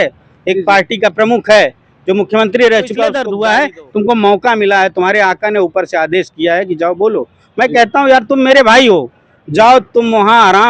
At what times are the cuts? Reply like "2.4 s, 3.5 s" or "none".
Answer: 3.3 s